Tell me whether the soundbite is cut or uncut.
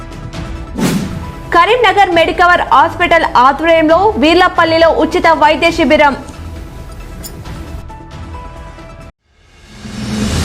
cut